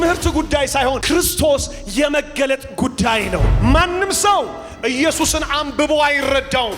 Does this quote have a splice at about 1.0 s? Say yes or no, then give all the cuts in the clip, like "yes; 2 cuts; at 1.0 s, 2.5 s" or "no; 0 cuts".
yes; 2 cuts; at 1.0 s, 3.5 s